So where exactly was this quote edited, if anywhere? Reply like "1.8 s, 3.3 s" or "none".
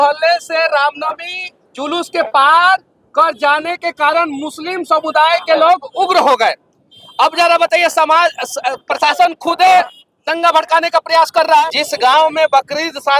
11.6 s

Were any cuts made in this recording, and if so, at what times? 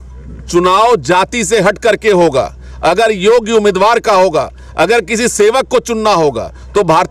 none

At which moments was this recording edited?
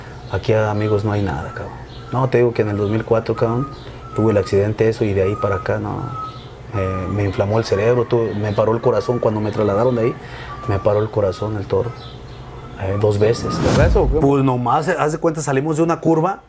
13.8 s

